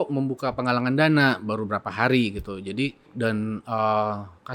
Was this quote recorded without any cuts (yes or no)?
no